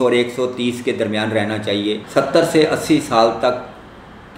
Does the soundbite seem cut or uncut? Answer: cut